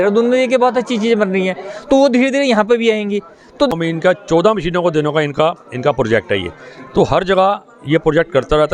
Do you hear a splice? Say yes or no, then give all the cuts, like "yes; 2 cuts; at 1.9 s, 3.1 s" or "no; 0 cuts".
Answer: yes; 1 cut; at 3.7 s